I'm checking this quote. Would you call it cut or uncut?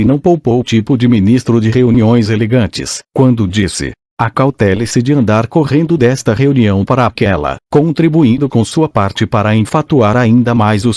uncut